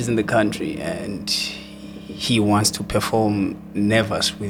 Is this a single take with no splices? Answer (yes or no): yes